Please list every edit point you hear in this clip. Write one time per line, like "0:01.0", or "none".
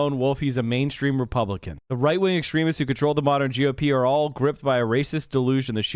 none